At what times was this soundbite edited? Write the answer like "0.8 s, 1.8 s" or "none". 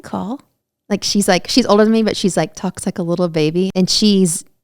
3.7 s